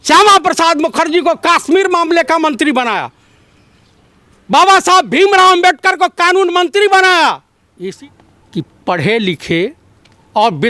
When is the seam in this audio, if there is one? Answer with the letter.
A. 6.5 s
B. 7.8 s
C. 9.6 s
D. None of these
B